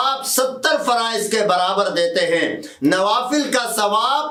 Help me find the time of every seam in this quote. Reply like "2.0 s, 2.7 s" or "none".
none